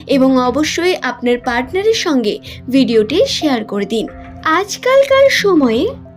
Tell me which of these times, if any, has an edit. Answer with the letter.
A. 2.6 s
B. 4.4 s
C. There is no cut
B